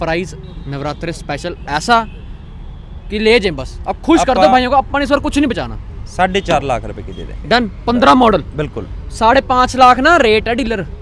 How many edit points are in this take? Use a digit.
0